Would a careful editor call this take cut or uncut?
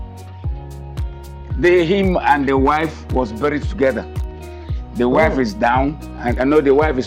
uncut